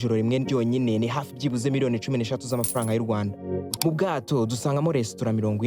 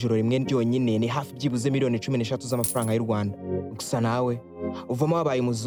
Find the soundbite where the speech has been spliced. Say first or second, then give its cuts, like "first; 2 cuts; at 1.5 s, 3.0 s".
first; 1 cut; at 3.7 s